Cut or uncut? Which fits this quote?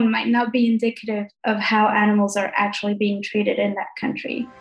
uncut